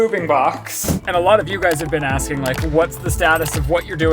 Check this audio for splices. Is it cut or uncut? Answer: cut